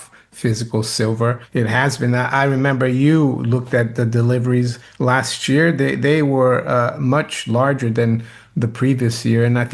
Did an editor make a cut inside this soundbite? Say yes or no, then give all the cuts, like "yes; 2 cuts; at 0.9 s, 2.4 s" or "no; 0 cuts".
yes; 2 cuts; at 1.4 s, 4.8 s